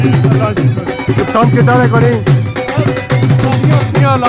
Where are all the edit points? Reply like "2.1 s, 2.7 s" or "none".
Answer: none